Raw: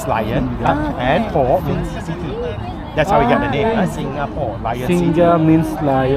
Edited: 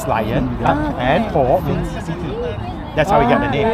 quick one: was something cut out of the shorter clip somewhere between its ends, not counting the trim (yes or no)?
no